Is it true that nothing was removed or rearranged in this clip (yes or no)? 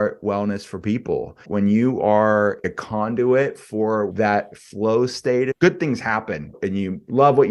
no